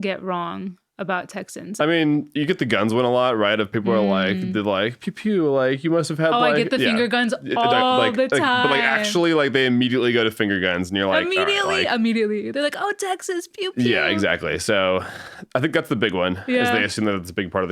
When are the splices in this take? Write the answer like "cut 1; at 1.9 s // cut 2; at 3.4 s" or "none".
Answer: cut 1; at 1.8 s

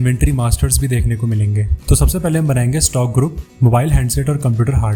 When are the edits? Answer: none

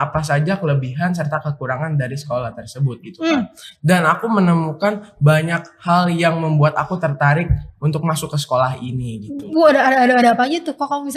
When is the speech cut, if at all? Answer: none

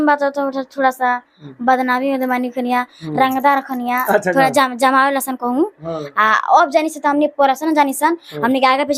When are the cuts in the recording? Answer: none

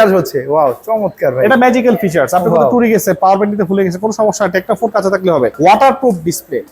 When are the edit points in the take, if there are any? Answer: cut 1; at 5.5 s

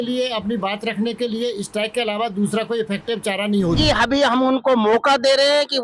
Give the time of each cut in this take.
cut 1; at 3.8 s

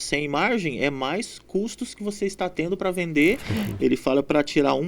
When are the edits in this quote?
cut 1; at 3.5 s

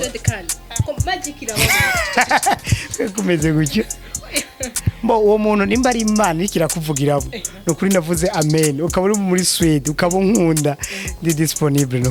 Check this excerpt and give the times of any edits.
none

